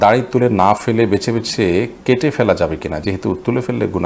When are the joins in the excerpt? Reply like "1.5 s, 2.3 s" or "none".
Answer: none